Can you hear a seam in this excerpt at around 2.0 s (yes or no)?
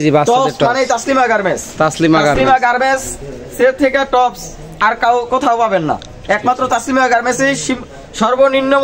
no